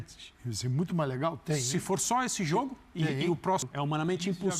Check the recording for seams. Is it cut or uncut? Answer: cut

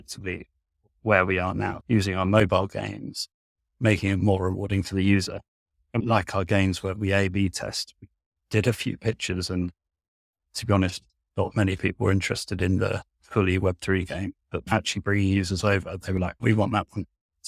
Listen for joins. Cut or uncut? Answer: cut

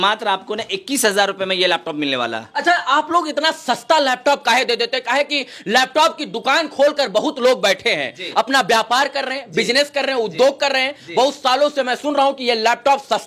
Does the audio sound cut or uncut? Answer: uncut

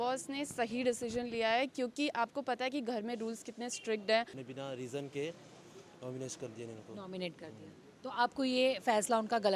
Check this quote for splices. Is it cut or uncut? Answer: cut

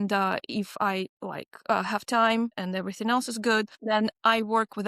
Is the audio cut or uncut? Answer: cut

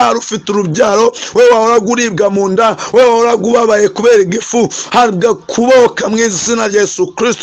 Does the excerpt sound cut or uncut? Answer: uncut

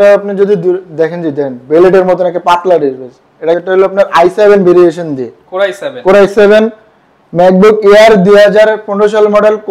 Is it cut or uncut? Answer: cut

